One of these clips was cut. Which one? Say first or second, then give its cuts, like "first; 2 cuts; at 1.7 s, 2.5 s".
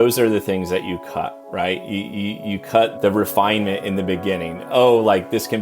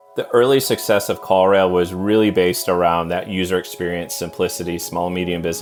first; 1 cut; at 2.9 s